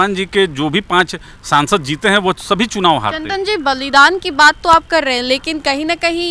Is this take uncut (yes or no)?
yes